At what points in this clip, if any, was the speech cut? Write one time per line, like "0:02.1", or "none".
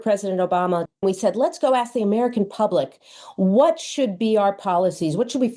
0:01.0